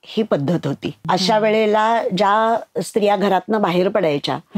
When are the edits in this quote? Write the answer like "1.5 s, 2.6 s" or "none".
1.0 s